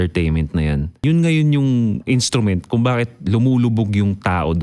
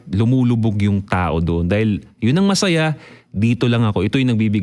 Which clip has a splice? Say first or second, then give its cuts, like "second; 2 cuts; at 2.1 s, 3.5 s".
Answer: first; 2 cuts; at 1.0 s, 2.0 s